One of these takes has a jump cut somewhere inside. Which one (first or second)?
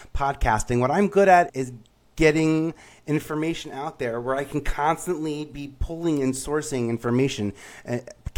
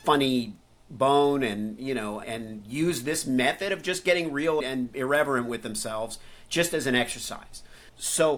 second